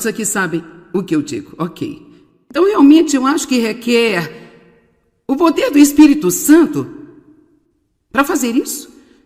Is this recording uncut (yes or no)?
yes